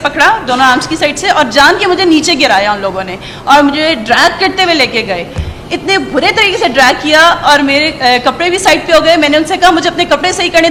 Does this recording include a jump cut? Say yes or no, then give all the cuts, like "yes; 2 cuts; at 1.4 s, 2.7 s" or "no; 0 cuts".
no; 0 cuts